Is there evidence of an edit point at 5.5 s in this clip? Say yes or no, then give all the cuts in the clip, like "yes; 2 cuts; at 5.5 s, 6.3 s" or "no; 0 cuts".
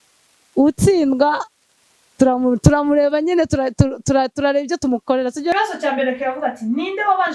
yes; 1 cut; at 5.5 s